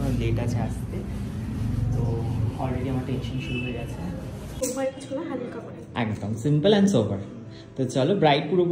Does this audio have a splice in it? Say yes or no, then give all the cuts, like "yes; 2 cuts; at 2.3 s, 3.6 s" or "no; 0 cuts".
yes; 1 cut; at 4.6 s